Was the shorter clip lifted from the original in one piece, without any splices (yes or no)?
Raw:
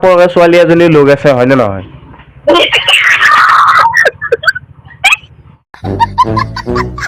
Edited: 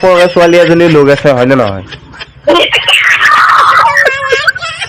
yes